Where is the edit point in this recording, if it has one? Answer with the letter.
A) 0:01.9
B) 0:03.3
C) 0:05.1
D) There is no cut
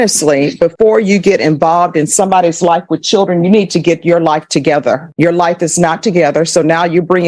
D